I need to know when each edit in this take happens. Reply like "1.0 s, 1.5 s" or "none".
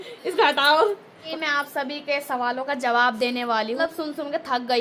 1.3 s, 3.8 s